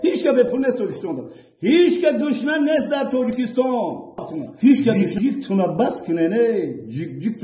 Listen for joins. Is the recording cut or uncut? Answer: cut